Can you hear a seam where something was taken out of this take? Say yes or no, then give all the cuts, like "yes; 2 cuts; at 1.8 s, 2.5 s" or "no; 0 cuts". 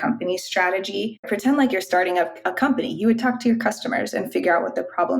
yes; 1 cut; at 1.2 s